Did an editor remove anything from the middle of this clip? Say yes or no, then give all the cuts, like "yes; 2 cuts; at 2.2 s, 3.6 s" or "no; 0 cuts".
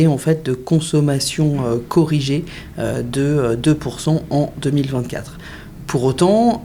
no; 0 cuts